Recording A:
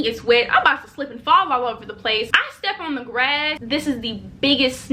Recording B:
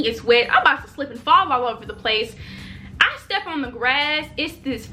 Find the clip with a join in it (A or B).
A